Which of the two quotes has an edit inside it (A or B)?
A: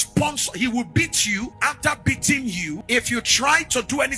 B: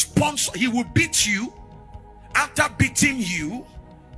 A